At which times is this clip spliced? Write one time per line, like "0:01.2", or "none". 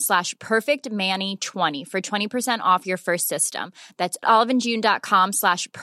0:01.7

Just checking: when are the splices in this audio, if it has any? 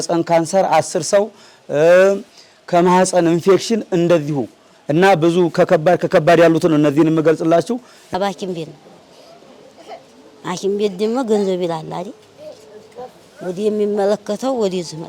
0:08.1

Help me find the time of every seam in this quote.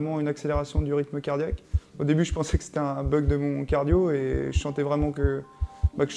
none

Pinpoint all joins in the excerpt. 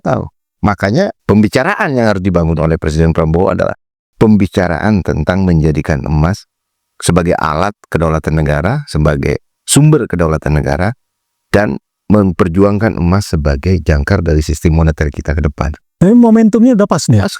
0:01.2

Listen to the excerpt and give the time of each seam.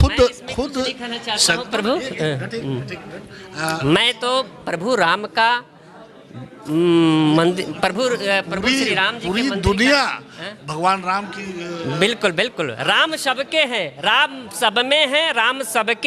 none

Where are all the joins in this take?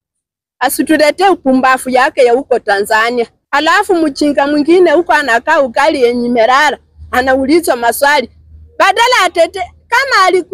0:03.4

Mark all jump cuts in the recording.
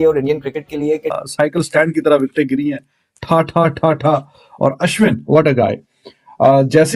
0:01.1

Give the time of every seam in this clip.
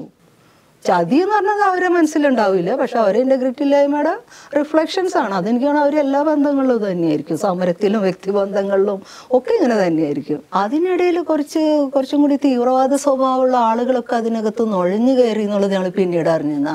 0:10.5

